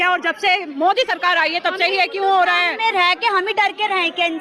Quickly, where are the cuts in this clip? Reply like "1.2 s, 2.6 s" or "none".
none